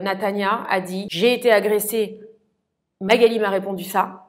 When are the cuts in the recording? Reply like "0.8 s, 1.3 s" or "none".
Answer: 1.0 s

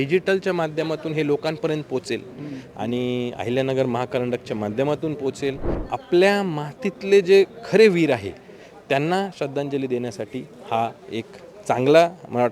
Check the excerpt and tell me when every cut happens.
5.8 s

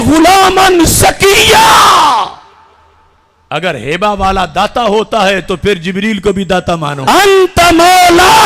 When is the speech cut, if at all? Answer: 7.0 s

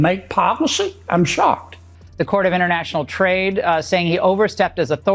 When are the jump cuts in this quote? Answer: 1.8 s

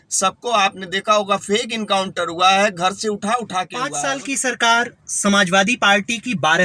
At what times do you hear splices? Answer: 3.7 s

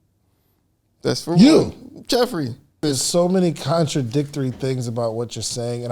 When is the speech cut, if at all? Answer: 2.8 s

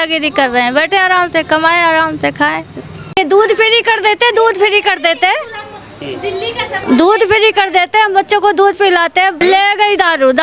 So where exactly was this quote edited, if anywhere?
3.1 s, 9.4 s

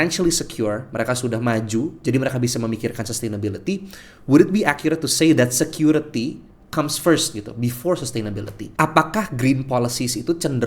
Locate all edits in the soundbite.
8.6 s

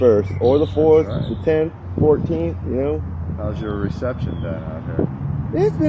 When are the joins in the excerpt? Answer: none

